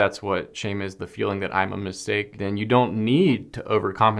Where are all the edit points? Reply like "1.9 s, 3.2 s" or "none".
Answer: 2.3 s